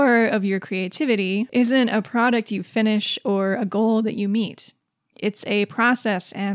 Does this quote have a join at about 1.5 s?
yes; 1 cut; at 1.5 s

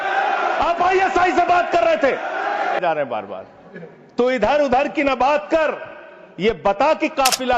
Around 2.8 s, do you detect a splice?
yes; 1 cut; at 2.8 s

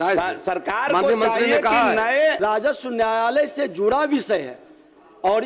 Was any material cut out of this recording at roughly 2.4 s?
yes; 1 cut; at 2.4 s

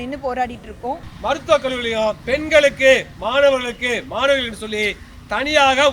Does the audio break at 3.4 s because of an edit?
no; 2 cuts; at 1.1 s, 2.2 s

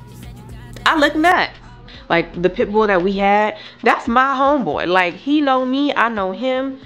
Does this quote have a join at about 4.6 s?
no; 1 cut; at 1.8 s

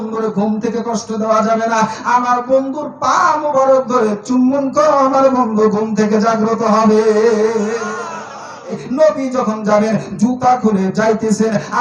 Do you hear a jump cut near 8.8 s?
yes; 1 cut; at 8.8 s

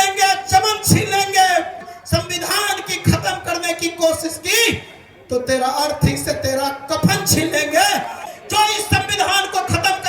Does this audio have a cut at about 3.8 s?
no; 2 cuts; at 1.9 s, 8.3 s

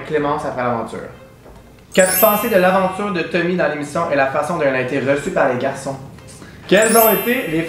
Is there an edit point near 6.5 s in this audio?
yes; 2 cuts; at 1.8 s, 6.5 s

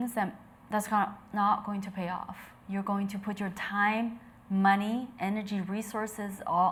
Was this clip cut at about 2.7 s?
no; 0 cuts

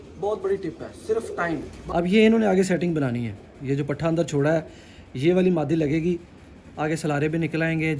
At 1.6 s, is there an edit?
yes; 1 cut; at 1.6 s

